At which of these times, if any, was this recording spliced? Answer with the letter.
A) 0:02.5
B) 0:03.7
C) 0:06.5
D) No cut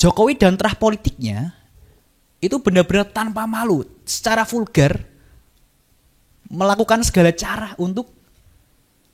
D